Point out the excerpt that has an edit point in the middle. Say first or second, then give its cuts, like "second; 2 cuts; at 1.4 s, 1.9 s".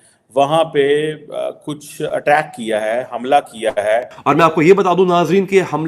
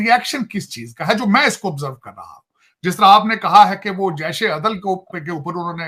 first; 1 cut; at 4.1 s